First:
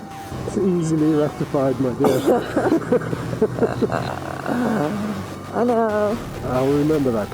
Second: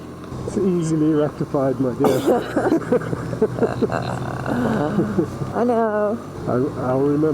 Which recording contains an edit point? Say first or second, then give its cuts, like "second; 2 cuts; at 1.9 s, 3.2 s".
first; 1 cut; at 6.4 s